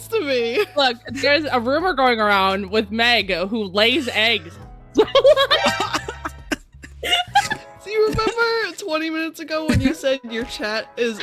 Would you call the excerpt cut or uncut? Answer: uncut